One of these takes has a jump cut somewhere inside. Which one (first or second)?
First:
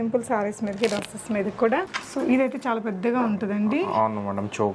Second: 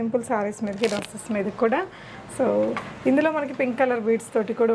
first